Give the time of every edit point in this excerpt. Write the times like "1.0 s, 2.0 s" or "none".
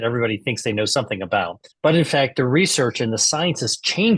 1.6 s